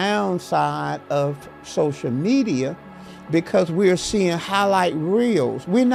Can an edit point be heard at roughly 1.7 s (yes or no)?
no